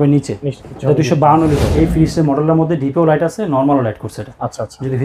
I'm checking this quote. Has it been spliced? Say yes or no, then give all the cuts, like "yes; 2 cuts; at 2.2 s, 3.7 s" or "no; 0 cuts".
yes; 1 cut; at 1.7 s